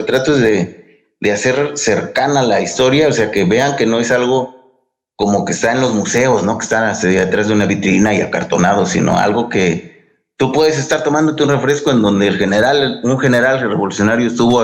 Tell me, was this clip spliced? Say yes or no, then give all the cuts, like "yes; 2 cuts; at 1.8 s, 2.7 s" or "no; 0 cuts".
no; 0 cuts